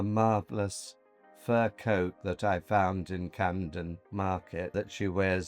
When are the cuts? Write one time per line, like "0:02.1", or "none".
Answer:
0:04.0
0:04.7